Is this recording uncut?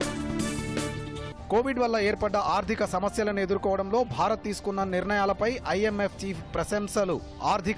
no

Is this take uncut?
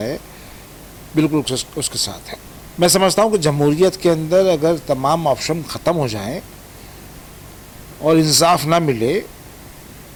yes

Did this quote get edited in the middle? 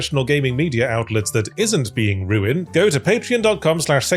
yes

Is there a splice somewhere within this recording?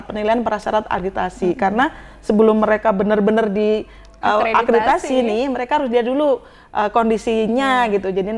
no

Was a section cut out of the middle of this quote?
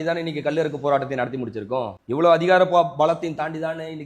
no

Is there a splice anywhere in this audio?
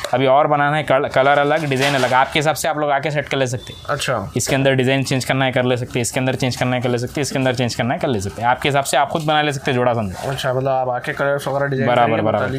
no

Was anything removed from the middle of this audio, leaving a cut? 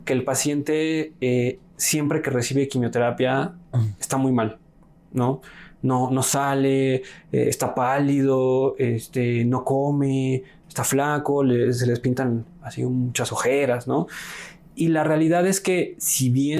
no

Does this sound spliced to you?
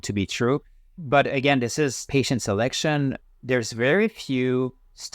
yes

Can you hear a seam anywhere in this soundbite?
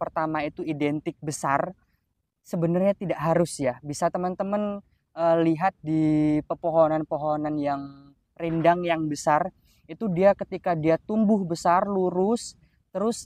no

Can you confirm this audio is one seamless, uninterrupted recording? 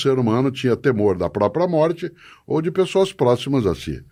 yes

